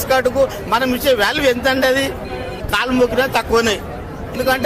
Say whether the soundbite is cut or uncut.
uncut